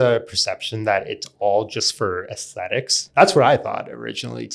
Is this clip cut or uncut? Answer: cut